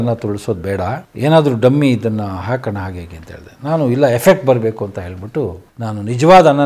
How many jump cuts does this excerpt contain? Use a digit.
2